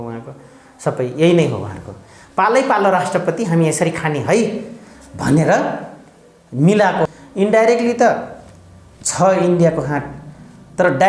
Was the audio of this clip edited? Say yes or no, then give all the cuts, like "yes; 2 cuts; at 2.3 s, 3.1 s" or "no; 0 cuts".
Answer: yes; 1 cut; at 7.1 s